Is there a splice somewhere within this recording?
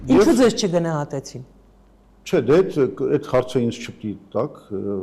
no; 0 cuts

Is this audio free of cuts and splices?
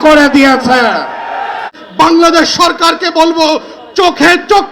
no; 1 cut; at 1.8 s

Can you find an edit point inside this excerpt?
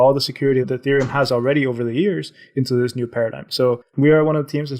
yes; 1 cut; at 3.9 s

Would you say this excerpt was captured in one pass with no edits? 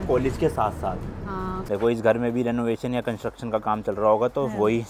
no; 1 cut; at 1.6 s

